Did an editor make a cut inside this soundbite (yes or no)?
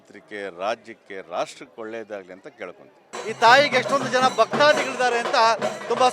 yes